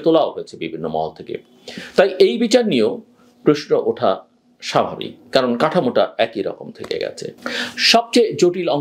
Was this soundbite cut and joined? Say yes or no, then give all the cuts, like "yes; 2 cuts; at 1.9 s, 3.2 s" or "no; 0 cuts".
yes; 1 cut; at 7.4 s